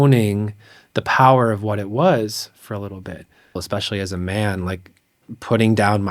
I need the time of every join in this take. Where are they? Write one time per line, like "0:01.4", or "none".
0:03.6